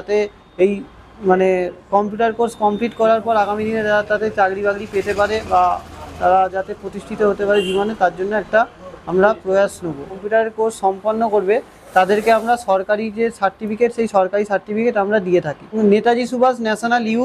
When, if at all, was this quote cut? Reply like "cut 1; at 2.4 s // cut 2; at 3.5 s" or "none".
cut 1; at 10.2 s // cut 2; at 15.7 s